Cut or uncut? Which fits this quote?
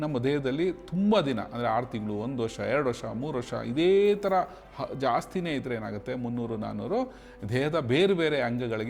uncut